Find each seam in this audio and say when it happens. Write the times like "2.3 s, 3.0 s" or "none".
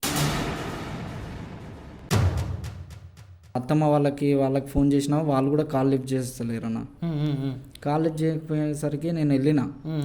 3.6 s